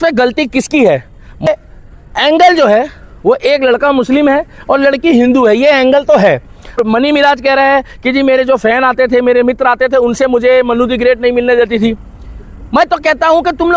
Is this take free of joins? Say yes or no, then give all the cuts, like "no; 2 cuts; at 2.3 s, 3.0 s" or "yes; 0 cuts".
no; 2 cuts; at 1.5 s, 6.8 s